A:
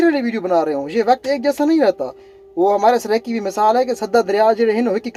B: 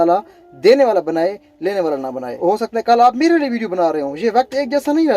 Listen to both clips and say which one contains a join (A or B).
B